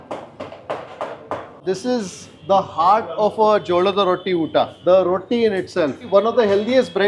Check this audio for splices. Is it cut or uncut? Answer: cut